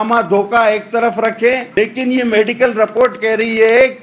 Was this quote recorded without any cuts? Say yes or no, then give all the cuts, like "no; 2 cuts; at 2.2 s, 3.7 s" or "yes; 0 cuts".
no; 1 cut; at 1.7 s